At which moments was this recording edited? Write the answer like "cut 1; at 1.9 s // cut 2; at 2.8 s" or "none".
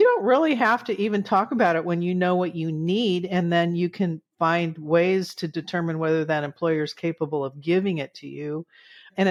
none